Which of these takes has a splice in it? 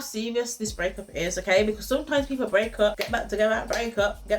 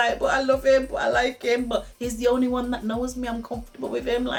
first; 1 cut; at 3.0 s

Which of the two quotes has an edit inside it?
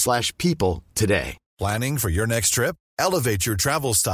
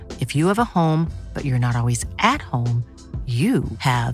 first; 1 cut; at 1.4 s

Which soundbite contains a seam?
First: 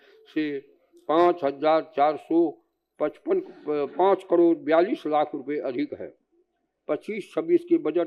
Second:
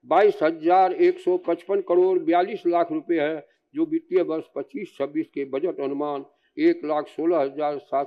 first; 1 cut; at 6.7 s

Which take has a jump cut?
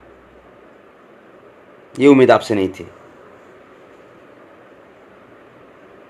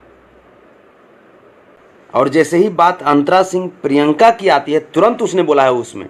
second; 1 cut; at 1.8 s

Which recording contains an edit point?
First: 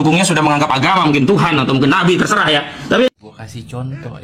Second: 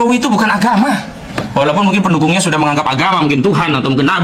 first; 1 cut; at 3.1 s

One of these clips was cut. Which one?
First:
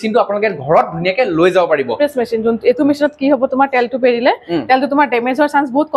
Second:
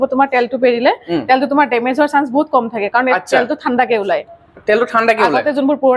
first; 1 cut; at 1.9 s

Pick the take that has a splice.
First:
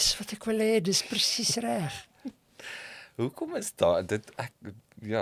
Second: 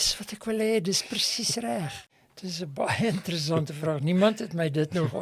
second; 1 cut; at 2.1 s

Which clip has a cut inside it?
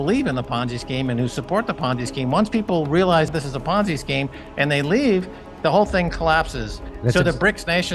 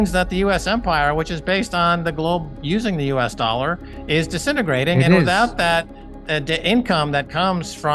first; 1 cut; at 6.9 s

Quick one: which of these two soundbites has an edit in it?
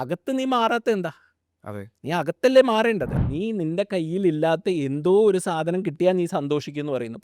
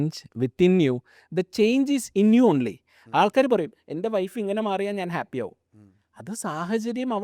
first; 1 cut; at 3.1 s

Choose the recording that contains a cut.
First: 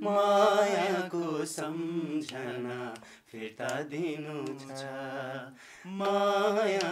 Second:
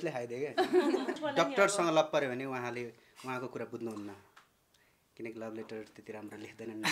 second; 1 cut; at 1.2 s

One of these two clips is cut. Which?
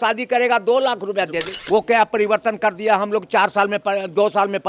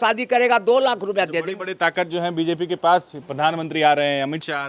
first; 1 cut; at 1.5 s

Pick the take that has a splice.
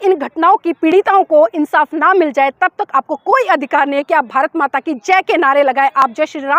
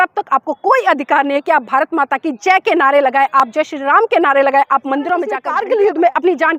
second; 1 cut; at 5.5 s

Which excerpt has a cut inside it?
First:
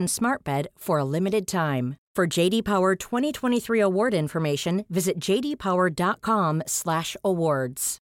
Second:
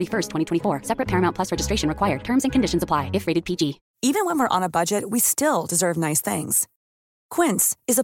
second; 1 cut; at 3.8 s

